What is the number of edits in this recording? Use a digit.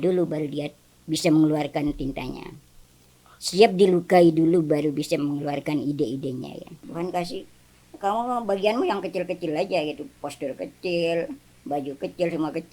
1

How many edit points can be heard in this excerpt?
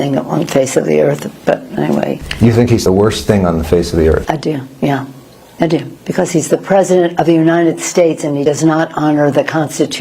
0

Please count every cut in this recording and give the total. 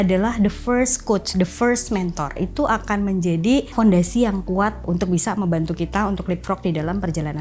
3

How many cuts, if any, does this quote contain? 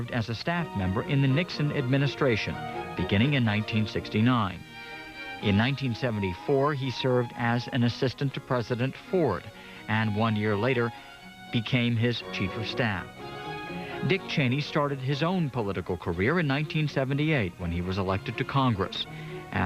1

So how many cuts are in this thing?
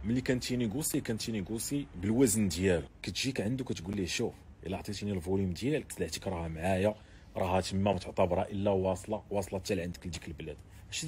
2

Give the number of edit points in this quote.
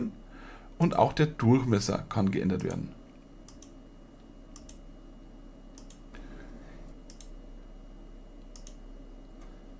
1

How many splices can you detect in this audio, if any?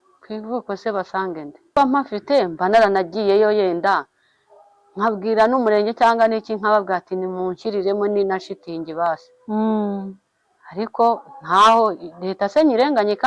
1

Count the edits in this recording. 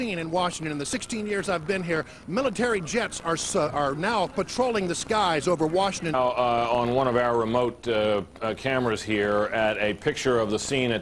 0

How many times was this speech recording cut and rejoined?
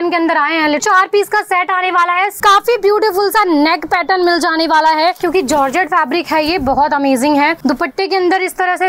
4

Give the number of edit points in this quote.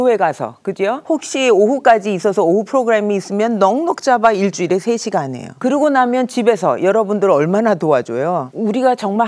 3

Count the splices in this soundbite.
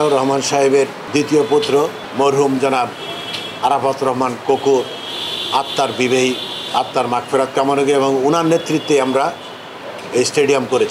2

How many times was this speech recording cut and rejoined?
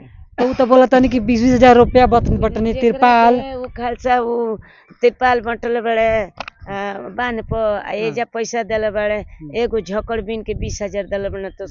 0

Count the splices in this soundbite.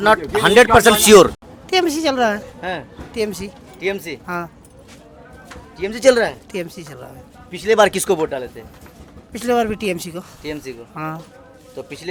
0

